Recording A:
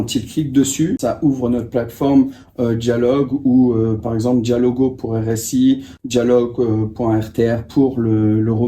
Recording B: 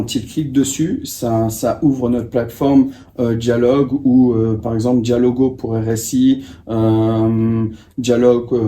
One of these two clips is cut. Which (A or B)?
A